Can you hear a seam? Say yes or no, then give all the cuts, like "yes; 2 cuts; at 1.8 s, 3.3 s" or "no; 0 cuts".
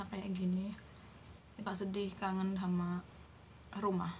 yes; 1 cut; at 1.7 s